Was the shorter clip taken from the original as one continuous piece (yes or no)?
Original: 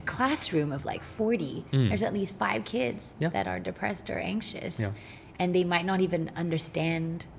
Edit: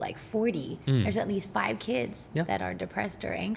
yes